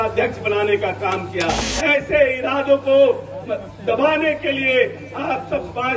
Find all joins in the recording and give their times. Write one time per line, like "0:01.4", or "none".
0:01.7